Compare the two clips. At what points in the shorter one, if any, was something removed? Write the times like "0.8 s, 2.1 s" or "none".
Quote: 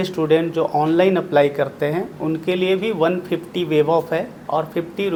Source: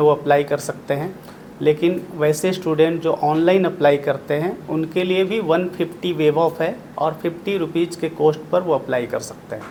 none

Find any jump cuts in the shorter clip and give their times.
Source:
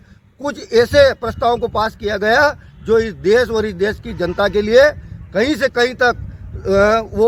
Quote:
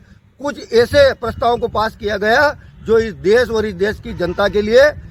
none

